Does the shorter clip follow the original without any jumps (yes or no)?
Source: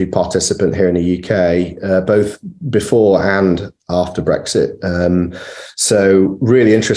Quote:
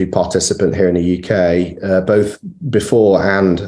yes